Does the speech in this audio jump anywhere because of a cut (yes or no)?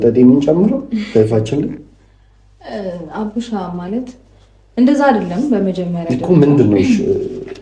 no